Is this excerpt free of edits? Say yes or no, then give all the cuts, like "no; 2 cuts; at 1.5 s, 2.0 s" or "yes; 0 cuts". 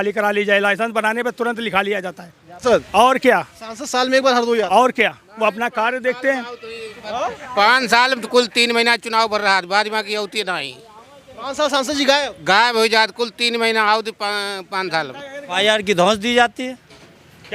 no; 2 cuts; at 2.4 s, 15.6 s